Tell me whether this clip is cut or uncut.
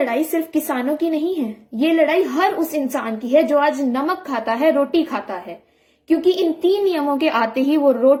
uncut